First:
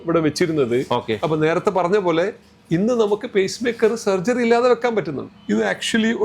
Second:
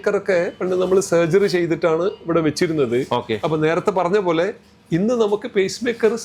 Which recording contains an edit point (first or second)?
first